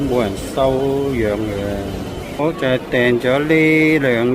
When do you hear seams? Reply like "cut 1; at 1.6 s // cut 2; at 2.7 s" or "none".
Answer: cut 1; at 2.4 s